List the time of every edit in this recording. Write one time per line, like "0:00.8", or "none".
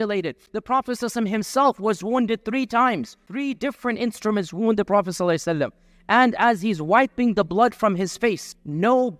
0:03.2

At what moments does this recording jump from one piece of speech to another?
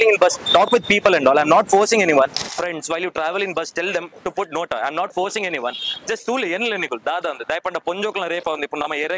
0:02.4

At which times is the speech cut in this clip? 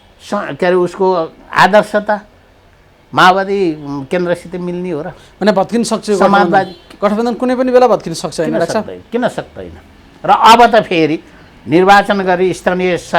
none

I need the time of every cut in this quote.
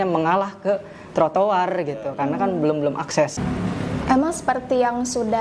0:03.4

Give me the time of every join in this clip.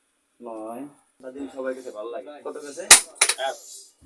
0:01.2

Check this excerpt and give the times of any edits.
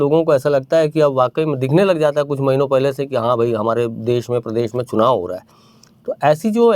none

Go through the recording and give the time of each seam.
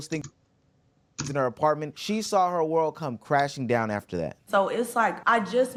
none

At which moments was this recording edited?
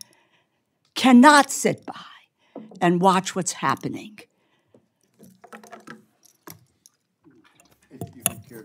none

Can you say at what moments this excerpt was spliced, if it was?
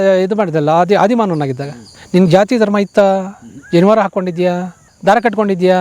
0:04.8

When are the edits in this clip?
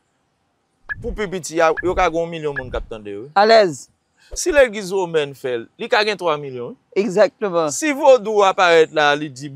none

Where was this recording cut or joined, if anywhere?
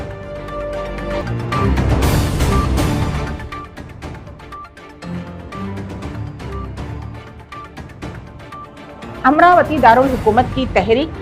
none

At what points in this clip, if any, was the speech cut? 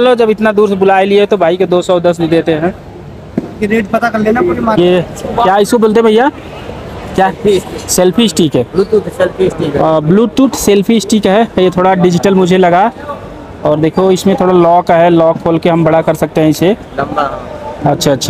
0:04.8

